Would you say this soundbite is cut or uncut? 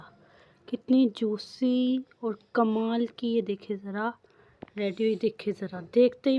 uncut